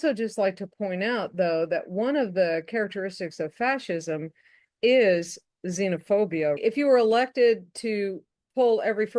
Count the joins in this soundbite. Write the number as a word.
one